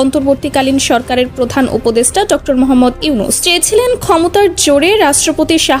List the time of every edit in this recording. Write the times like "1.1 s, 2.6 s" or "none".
3.4 s